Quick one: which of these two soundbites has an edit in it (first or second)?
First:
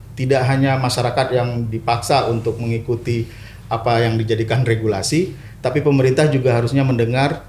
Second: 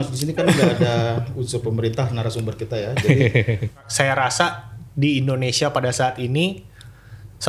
second